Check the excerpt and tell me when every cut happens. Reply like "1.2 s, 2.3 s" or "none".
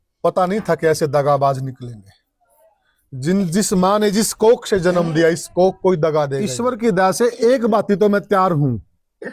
6.5 s